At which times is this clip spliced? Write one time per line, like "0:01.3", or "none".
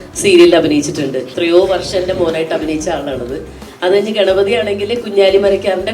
0:01.3